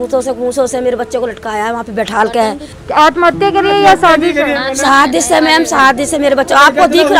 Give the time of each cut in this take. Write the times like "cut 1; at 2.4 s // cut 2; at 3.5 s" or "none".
cut 1; at 2.7 s